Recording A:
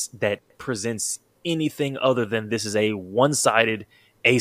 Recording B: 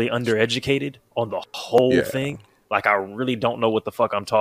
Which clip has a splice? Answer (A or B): A